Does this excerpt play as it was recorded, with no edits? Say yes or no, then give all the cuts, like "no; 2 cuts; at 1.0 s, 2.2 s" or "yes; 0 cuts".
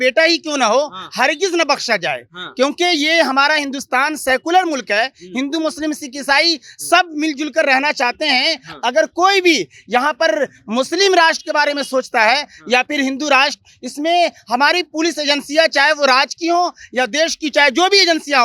yes; 0 cuts